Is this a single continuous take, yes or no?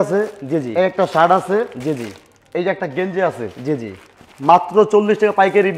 yes